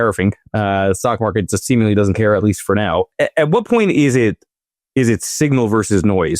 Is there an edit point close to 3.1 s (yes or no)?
yes